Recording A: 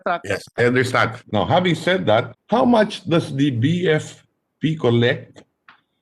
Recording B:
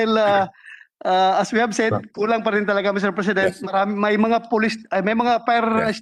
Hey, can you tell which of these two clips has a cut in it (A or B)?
A